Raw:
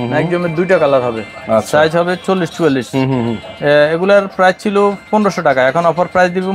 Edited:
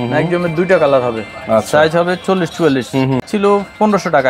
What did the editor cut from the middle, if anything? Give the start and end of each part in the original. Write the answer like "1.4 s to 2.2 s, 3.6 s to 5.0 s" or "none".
3.3 s to 4.6 s